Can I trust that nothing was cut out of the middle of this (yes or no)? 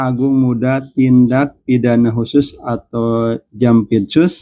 yes